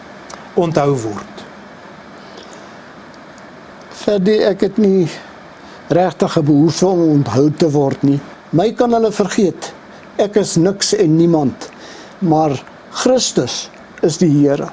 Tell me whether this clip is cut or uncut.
cut